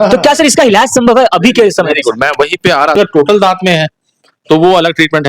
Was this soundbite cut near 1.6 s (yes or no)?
no